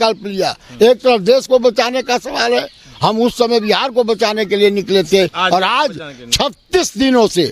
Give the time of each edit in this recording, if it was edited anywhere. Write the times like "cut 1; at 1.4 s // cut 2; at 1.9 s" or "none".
none